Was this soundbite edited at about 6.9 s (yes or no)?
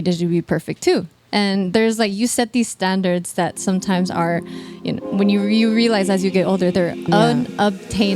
yes